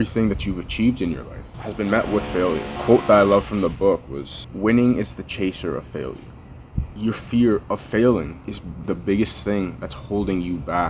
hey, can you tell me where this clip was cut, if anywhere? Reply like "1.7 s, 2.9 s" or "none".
1.5 s, 6.9 s, 8.8 s